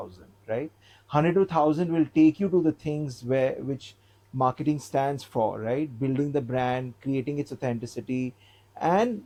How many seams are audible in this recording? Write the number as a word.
zero